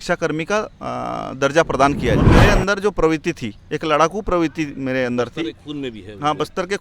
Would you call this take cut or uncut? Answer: cut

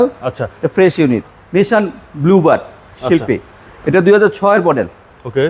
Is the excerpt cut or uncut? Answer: cut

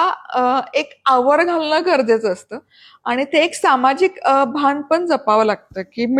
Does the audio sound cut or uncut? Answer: uncut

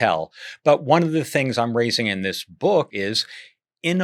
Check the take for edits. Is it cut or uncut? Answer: cut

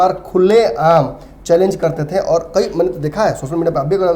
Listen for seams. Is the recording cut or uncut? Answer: uncut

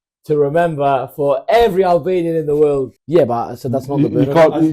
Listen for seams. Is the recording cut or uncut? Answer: cut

